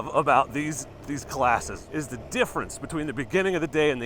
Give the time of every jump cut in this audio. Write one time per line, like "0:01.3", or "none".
0:01.8